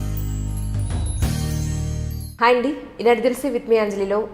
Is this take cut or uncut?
uncut